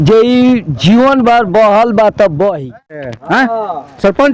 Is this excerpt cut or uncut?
cut